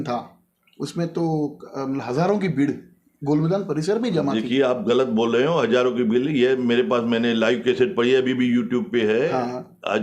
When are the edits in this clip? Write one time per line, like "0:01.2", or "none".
none